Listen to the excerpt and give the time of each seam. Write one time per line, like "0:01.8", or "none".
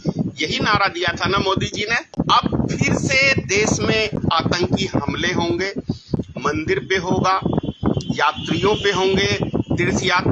0:02.1